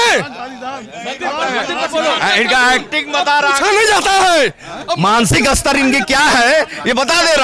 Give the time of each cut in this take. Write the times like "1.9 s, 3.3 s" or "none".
none